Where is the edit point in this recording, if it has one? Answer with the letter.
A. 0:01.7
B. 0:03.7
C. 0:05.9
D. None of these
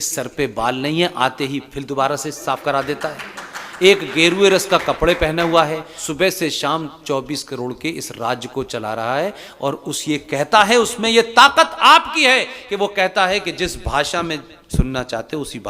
C